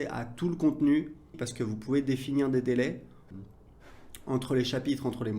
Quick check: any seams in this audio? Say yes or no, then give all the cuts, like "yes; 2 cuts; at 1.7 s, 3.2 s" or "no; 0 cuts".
yes; 2 cuts; at 1.4 s, 3.2 s